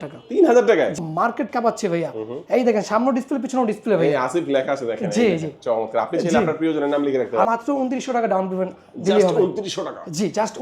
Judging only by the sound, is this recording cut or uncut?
cut